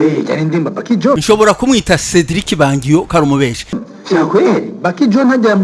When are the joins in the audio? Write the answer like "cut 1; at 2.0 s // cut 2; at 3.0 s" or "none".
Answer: cut 1; at 1.2 s // cut 2; at 3.8 s